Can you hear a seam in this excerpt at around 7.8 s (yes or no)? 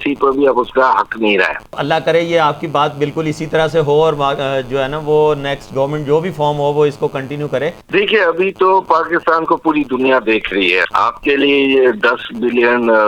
yes